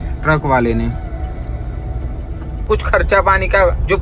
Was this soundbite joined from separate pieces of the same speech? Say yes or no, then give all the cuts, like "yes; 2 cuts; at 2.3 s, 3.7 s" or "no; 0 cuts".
yes; 1 cut; at 2.7 s